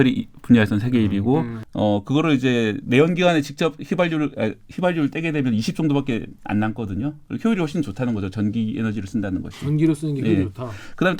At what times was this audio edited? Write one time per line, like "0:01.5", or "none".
0:01.5